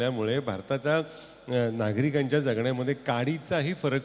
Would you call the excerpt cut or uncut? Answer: uncut